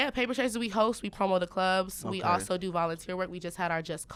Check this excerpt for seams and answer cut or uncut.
uncut